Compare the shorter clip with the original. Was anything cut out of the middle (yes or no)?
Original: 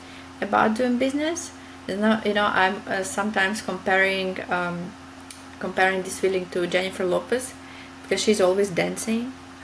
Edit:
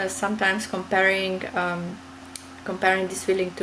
no